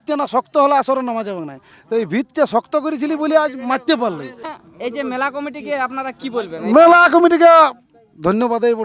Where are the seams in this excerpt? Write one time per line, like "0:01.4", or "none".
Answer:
none